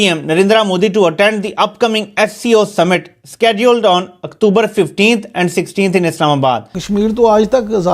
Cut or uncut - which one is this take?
cut